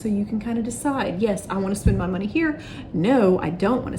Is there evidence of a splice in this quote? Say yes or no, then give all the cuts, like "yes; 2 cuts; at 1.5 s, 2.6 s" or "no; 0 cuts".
no; 0 cuts